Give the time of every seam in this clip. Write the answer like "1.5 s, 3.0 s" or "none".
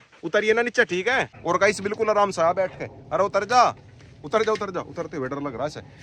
none